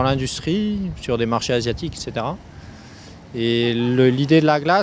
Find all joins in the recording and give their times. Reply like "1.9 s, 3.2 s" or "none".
1.8 s